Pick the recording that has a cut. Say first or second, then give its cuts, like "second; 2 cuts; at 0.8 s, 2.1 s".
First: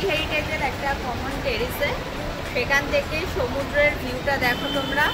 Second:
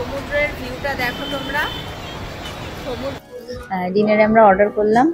second; 1 cut; at 3.2 s